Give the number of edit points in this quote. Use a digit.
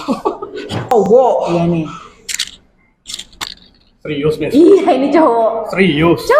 1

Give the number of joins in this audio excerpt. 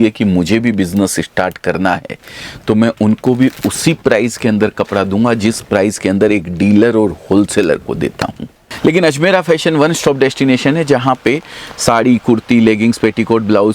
1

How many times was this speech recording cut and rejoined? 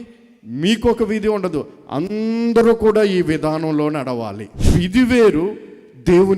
1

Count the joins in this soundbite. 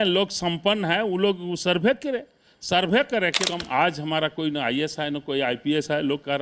1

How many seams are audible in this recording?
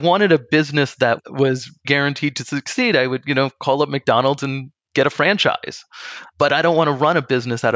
1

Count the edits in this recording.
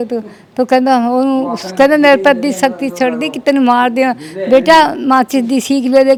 0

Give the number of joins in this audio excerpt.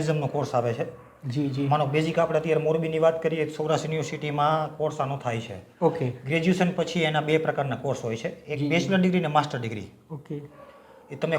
0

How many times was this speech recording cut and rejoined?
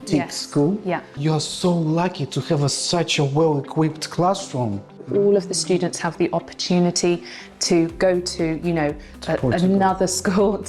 2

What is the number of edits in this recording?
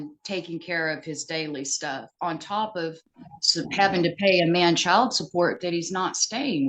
0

